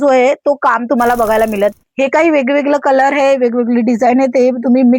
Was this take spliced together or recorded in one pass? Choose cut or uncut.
cut